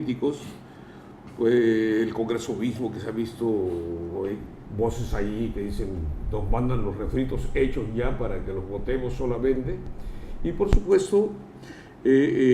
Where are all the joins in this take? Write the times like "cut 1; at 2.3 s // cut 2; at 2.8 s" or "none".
cut 1; at 7.0 s